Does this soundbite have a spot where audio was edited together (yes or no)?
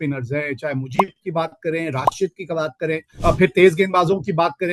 yes